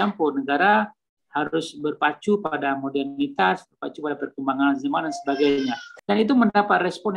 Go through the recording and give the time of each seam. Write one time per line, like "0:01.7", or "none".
0:05.9